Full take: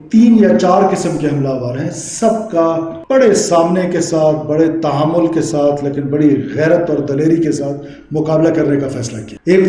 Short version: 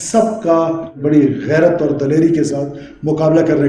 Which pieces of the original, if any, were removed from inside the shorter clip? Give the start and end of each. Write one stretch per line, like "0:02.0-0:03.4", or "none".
0:03.0-0:06.0

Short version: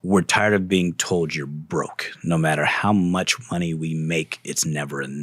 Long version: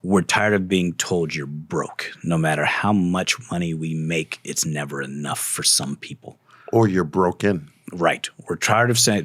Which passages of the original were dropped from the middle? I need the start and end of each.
none

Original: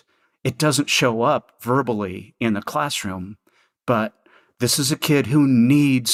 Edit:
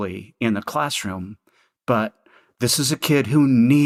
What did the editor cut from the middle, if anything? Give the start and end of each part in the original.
none

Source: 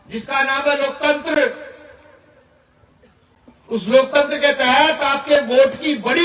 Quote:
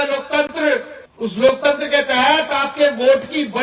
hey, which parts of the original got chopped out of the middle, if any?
0:01.7-0:03.5

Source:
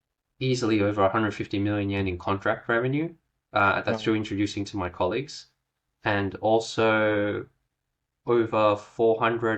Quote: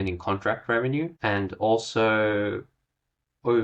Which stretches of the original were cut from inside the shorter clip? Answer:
0:03.1-0:06.0

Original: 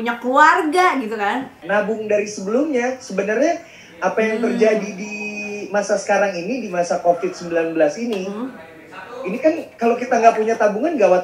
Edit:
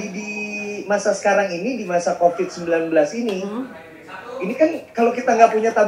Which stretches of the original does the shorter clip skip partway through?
none

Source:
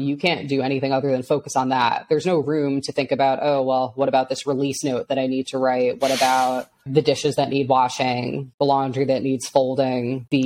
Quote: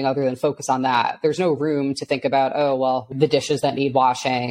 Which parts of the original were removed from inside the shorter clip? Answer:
0:03.9-0:06.8

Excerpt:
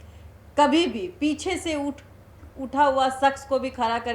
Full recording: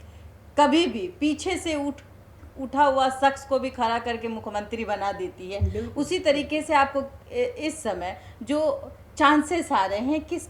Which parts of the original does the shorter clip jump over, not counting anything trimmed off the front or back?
none

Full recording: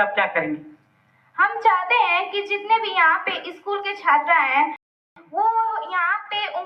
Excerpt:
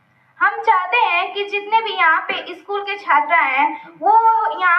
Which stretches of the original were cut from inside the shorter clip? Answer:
0:04.8-0:05.2

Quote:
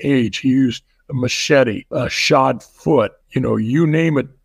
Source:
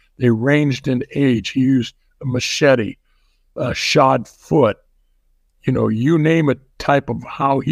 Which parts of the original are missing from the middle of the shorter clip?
0:03.0-0:03.5
0:04.9-0:05.5

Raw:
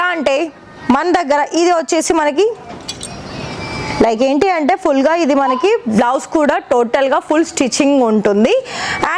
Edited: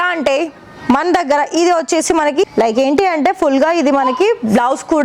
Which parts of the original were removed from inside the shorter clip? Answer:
0:02.4-0:03.9

